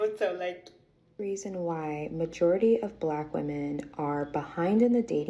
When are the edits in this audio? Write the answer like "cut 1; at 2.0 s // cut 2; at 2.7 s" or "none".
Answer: cut 1; at 1.1 s